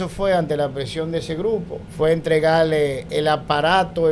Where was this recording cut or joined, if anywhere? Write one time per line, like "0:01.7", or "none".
0:01.8
0:03.0

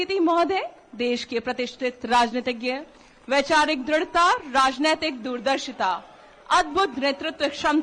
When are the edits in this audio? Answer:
none

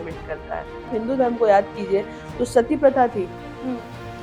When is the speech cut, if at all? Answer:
0:00.9

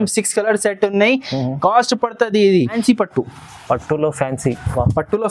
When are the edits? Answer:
0:02.8

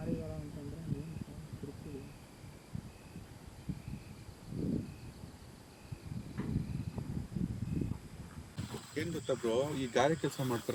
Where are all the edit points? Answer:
0:08.6

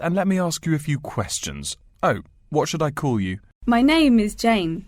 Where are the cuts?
0:03.5

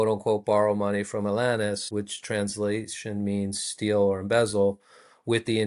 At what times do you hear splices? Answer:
0:01.8

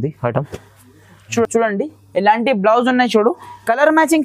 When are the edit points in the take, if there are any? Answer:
0:01.4

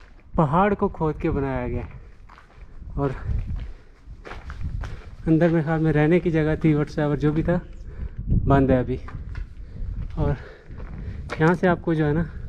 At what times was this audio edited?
none

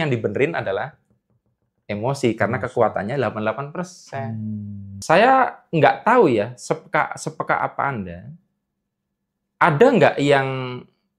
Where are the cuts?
0:04.9

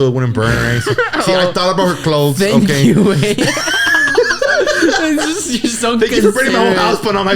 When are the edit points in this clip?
none

